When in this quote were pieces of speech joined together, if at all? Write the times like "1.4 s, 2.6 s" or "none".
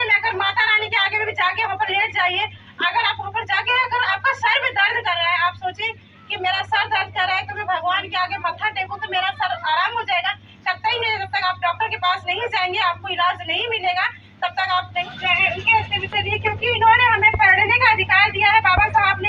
15.0 s